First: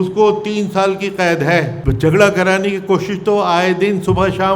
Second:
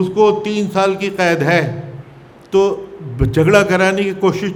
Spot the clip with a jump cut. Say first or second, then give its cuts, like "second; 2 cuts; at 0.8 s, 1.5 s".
first; 1 cut; at 1.8 s